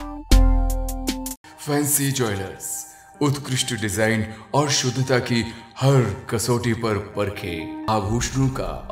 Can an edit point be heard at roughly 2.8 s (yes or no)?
no